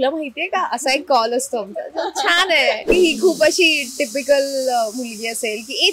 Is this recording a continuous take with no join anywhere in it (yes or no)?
no